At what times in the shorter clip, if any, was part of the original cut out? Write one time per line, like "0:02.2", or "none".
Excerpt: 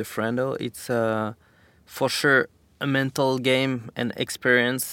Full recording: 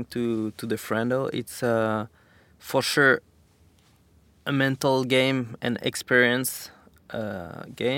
0:02.6